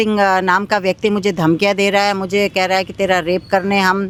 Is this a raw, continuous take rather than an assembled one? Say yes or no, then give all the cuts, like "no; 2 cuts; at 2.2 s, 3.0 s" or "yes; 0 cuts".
yes; 0 cuts